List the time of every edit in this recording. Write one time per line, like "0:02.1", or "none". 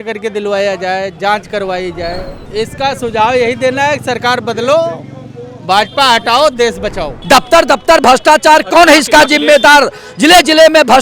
0:02.4
0:07.1

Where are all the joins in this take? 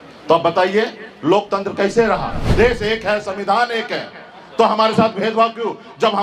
0:02.4

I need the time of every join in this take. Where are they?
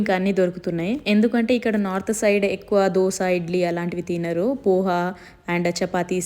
0:01.0

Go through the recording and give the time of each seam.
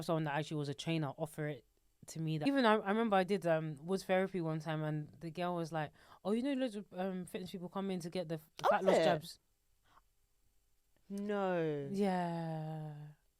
0:02.4

